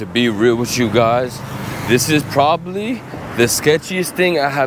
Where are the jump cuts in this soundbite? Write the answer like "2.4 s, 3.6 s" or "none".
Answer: none